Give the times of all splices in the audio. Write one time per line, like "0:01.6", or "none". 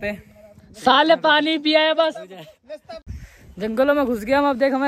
0:03.0